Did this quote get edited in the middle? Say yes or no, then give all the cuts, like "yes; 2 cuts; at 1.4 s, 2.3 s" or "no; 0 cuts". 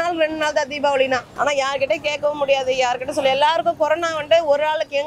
yes; 1 cut; at 1.3 s